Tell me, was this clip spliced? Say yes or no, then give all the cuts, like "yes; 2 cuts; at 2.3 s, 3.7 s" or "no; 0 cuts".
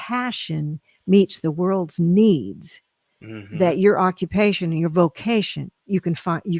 no; 0 cuts